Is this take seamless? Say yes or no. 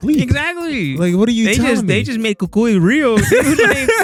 yes